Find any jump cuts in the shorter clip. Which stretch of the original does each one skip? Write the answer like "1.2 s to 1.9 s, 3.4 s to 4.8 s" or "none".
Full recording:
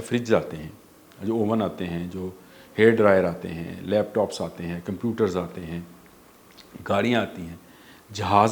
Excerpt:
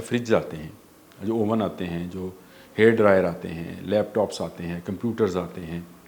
none